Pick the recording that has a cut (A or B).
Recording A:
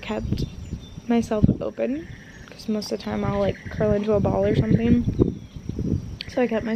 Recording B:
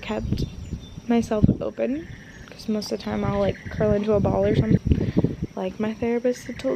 B